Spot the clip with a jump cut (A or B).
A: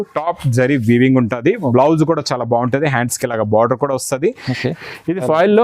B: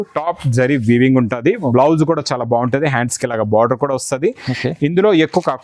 A